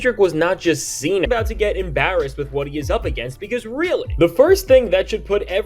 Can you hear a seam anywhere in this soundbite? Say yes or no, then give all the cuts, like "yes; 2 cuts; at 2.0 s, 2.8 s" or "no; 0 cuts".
yes; 1 cut; at 1.3 s